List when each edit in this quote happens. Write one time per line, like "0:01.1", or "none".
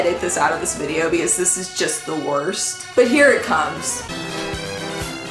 0:04.0